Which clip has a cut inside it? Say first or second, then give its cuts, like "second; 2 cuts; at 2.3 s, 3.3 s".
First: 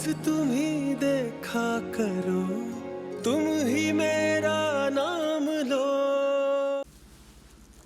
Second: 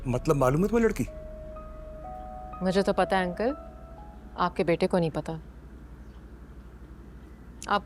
first; 1 cut; at 6.8 s